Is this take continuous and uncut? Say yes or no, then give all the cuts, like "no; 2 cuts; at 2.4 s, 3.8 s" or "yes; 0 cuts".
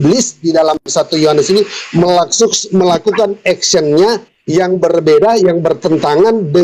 yes; 0 cuts